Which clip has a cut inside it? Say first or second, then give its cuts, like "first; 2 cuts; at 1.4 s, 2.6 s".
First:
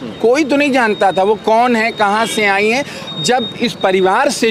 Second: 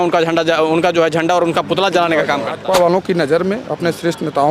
second; 1 cut; at 2.6 s